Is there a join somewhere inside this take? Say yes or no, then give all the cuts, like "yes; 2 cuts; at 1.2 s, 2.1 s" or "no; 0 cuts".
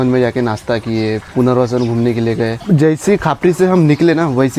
yes; 2 cuts; at 1.3 s, 2.6 s